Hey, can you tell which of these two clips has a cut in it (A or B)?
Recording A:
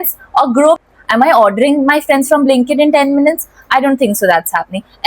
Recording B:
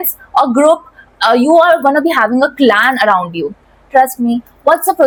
A